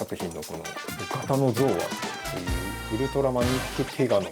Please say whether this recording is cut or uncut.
cut